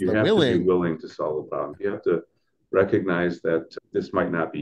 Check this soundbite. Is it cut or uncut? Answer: cut